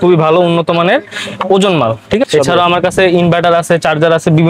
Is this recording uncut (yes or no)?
no